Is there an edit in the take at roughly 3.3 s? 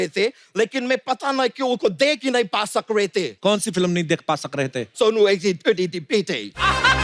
yes; 2 cuts; at 3.3 s, 4.9 s

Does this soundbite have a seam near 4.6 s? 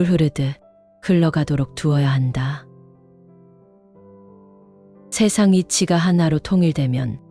yes; 2 cuts; at 2.6 s, 4.6 s

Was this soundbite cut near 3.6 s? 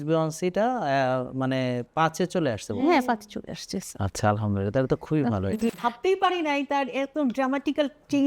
no; 1 cut; at 5.7 s

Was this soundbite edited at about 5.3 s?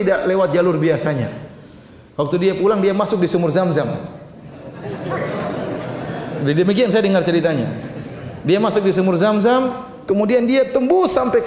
no; 0 cuts

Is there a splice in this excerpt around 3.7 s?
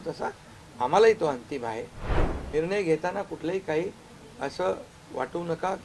no; 1 cut; at 2.2 s

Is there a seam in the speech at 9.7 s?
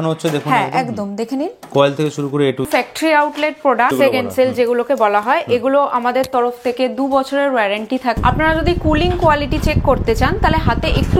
no; 3 cuts; at 2.7 s, 3.9 s, 8.2 s

